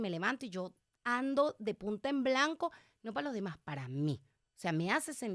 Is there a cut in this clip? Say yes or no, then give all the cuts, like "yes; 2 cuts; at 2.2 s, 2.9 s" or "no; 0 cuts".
no; 0 cuts